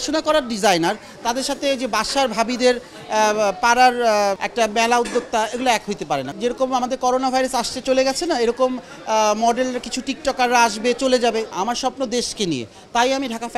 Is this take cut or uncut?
cut